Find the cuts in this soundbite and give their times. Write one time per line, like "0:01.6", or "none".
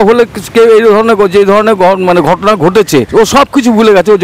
0:03.1